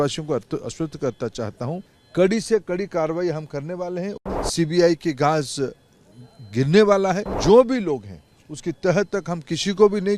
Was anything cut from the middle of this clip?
yes; 3 cuts; at 2.0 s, 4.2 s, 7.3 s

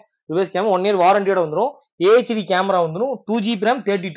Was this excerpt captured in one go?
yes; 0 cuts

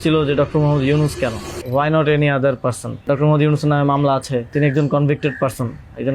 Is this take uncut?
no; 3 cuts; at 1.5 s, 3.0 s, 4.5 s

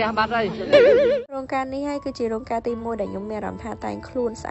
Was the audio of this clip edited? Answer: yes; 1 cut; at 1.2 s

